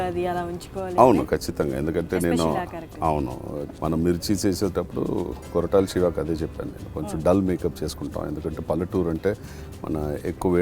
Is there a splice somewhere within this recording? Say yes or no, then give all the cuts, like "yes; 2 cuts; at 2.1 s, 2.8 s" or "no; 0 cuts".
yes; 1 cut; at 3.6 s